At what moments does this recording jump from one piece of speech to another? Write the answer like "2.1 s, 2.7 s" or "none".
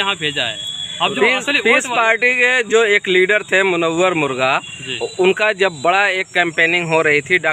none